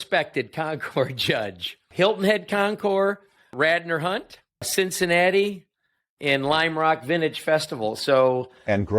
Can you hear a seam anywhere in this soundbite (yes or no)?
yes